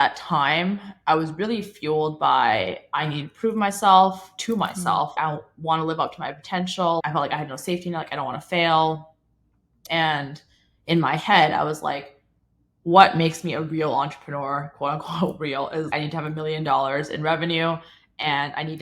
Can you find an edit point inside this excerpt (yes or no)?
yes